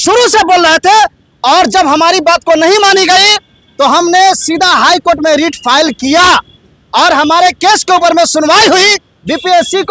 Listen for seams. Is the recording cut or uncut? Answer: uncut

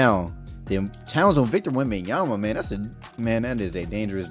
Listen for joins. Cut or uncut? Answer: uncut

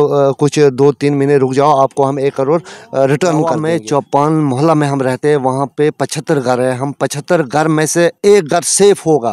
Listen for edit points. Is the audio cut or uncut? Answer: cut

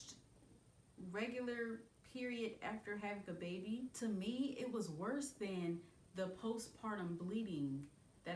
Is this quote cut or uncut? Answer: uncut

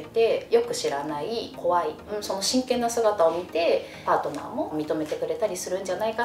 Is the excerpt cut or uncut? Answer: cut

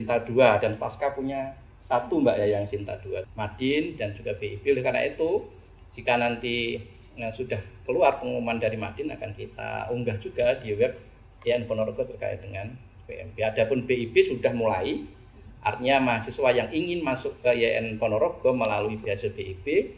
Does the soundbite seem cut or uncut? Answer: cut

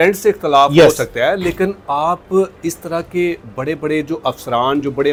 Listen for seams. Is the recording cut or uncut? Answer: uncut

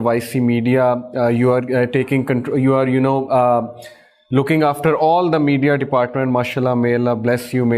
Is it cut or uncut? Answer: uncut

